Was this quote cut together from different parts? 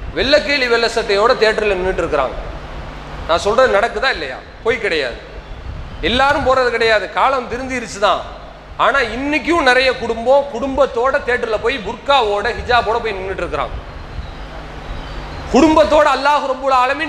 no; 0 cuts

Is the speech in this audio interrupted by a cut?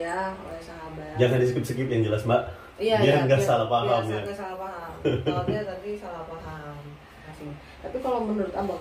yes; 1 cut; at 7.3 s

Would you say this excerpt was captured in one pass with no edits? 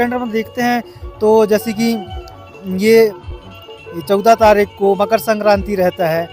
yes; 0 cuts

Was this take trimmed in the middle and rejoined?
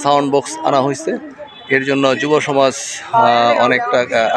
no; 0 cuts

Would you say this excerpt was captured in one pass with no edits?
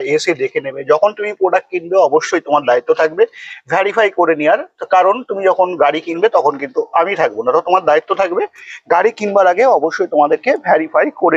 yes; 0 cuts

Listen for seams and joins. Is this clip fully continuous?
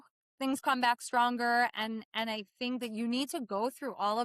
yes; 0 cuts

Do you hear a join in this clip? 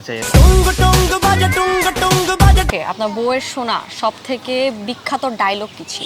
yes; 1 cut; at 2.7 s

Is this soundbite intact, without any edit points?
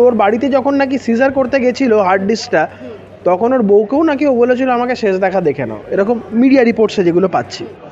yes; 0 cuts

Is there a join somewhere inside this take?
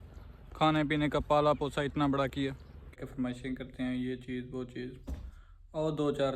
yes; 1 cut; at 2.9 s

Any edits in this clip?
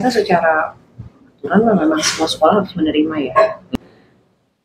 yes; 1 cut; at 3.7 s

